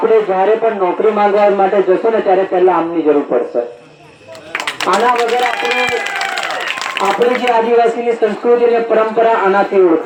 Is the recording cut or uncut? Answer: uncut